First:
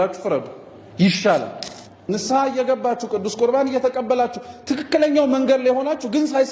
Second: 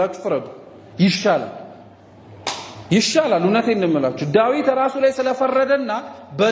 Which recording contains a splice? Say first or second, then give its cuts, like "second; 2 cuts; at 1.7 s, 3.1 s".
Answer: first; 1 cut; at 2.0 s